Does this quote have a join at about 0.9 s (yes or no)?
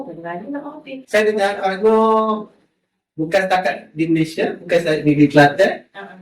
yes